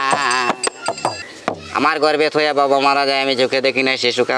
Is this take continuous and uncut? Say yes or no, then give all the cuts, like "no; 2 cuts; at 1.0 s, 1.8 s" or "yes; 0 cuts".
no; 1 cut; at 1.2 s